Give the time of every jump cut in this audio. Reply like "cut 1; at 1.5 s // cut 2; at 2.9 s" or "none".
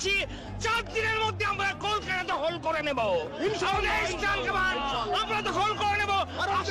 none